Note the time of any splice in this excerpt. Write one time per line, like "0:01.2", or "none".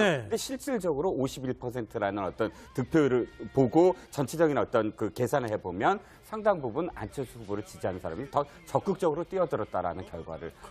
none